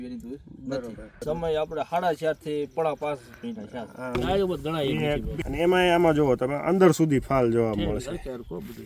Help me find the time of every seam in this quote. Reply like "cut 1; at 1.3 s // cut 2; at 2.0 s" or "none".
cut 1; at 1.2 s // cut 2; at 4.1 s // cut 3; at 5.4 s